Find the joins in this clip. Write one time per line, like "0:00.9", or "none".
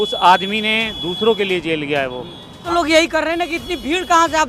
0:02.5